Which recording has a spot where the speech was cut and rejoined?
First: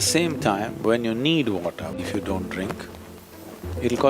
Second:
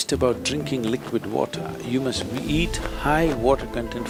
first; 1 cut; at 2.0 s

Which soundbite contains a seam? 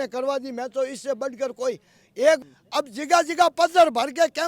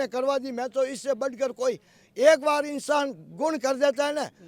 first; 1 cut; at 2.4 s

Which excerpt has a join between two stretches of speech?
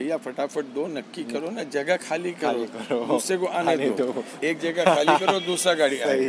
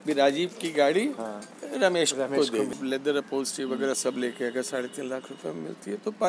second; 1 cut; at 2.8 s

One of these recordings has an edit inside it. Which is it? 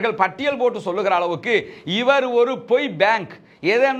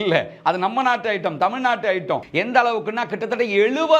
second; 1 cut; at 2.3 s

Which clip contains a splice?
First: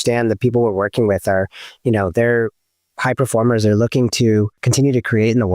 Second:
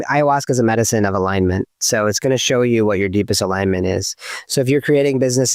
first; 1 cut; at 4.6 s

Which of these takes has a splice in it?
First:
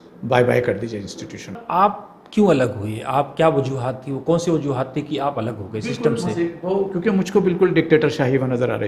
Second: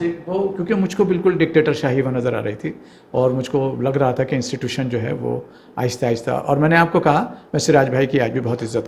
first; 1 cut; at 1.6 s

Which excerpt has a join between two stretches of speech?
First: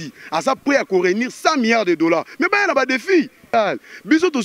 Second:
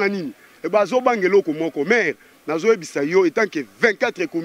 first; 1 cut; at 3.5 s

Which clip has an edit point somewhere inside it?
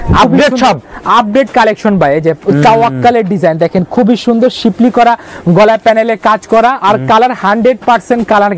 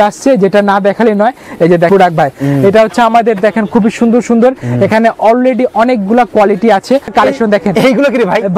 second; 2 cuts; at 1.9 s, 7.1 s

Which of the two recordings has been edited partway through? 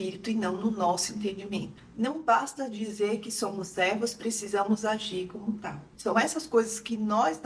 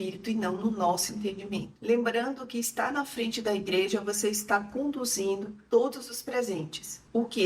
first; 2 cuts; at 1.7 s, 5.9 s

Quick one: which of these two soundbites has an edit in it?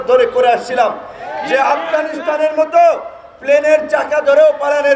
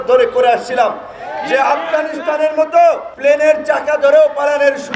second; 1 cut; at 3.1 s

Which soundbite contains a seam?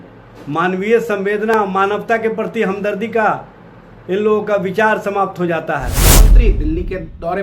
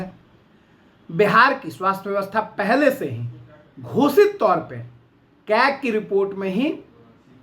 first; 1 cut; at 6.3 s

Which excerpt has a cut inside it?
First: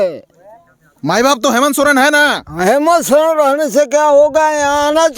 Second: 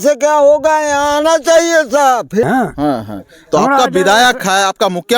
second; 1 cut; at 2.4 s

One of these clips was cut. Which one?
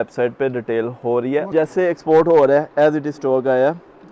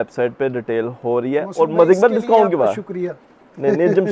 first; 1 cut; at 1.5 s

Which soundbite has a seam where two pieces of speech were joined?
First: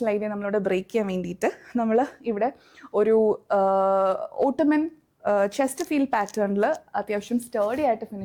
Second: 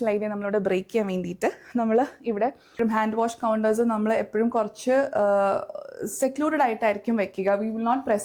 second; 1 cut; at 2.7 s

